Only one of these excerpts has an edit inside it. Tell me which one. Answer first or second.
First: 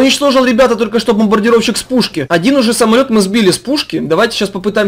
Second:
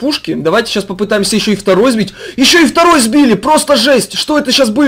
first